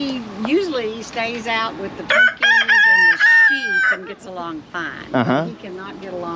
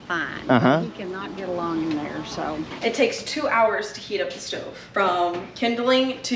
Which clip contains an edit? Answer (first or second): second